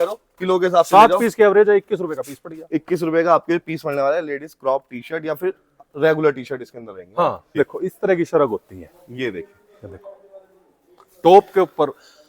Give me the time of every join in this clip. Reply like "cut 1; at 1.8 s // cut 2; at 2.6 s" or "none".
cut 1; at 7.6 s